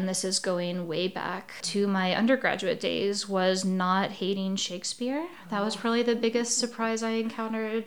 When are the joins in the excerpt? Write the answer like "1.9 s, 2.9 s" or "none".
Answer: 1.5 s